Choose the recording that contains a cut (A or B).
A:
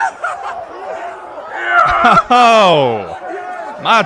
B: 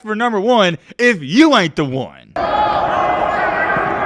B